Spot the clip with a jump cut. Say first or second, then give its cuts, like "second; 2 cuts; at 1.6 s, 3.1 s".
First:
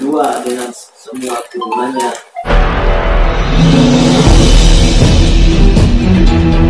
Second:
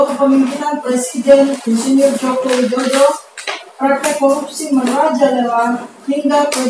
first; 1 cut; at 2.3 s